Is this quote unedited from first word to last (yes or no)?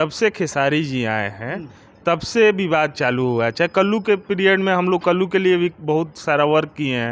yes